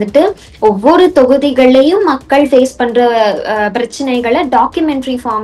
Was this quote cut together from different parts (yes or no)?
no